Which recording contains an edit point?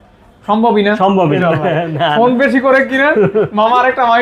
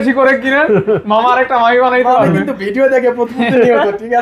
first; 1 cut; at 1.4 s

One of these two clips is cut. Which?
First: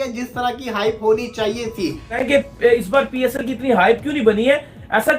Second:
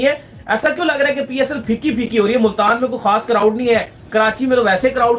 first; 1 cut; at 2.2 s

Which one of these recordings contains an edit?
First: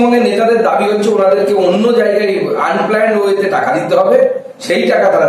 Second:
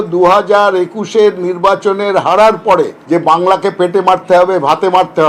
second; 1 cut; at 3.0 s

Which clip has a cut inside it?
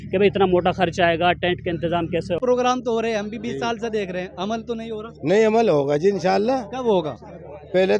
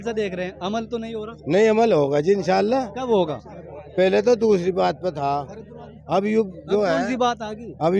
first; 1 cut; at 2.4 s

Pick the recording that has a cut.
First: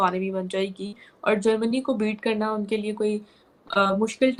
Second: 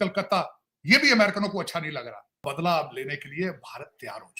second; 1 cut; at 2.5 s

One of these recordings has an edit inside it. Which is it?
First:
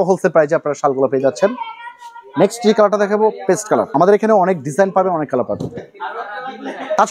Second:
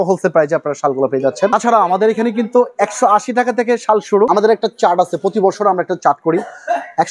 second; 2 cuts; at 1.5 s, 4.3 s

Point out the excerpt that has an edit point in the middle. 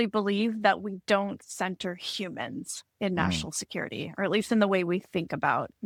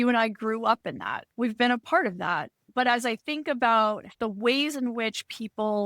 second; 3 cuts; at 1.2 s, 2.6 s, 4.1 s

